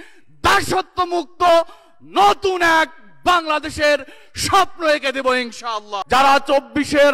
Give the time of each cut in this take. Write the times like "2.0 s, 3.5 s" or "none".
5.9 s